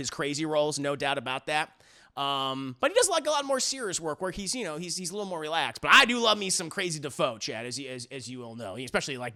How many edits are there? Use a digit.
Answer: 0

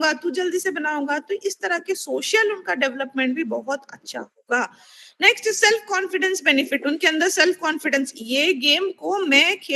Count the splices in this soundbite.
0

